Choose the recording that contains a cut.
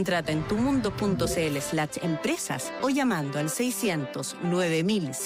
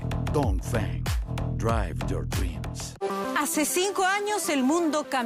second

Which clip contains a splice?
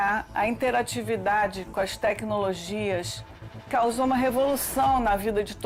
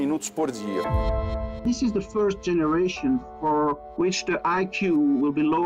second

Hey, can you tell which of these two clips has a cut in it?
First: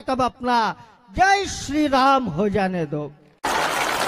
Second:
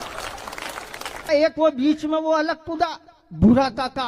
second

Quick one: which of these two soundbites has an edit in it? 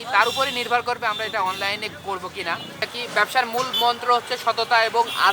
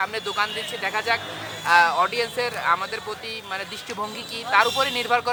first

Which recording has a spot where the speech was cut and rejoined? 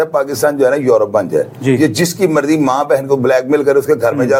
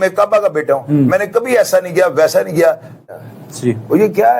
second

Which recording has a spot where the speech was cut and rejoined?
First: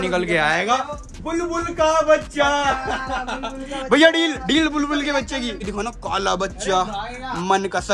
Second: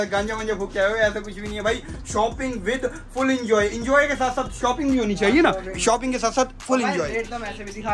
first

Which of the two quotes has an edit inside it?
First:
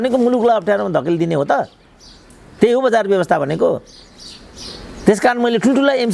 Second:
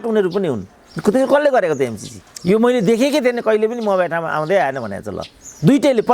second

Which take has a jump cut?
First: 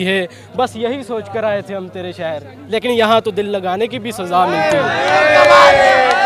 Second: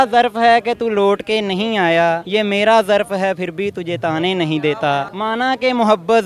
second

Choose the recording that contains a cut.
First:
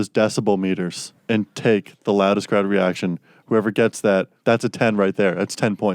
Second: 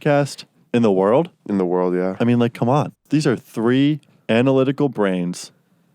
second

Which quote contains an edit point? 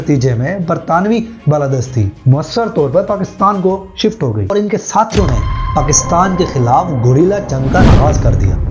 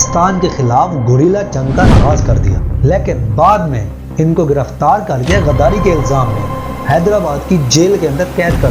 first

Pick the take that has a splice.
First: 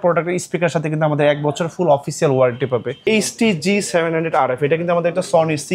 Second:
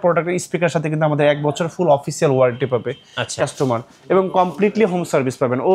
first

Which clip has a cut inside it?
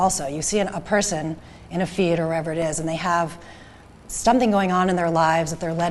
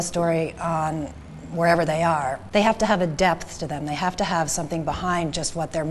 second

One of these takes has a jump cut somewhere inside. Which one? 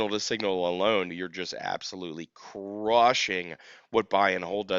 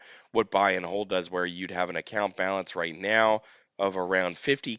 first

